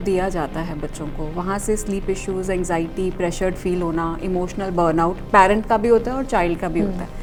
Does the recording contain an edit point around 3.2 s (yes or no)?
no